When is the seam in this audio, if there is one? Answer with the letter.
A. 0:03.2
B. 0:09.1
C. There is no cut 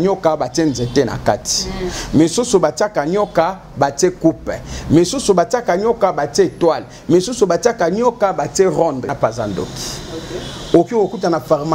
B